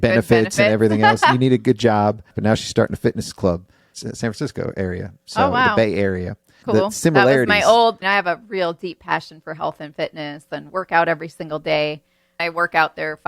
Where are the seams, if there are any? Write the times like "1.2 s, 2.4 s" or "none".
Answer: 2.3 s, 3.8 s, 6.6 s, 8.0 s, 12.4 s